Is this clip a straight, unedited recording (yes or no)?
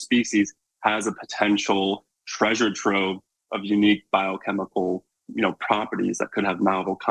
yes